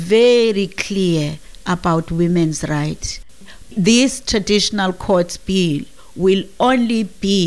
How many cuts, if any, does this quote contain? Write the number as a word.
one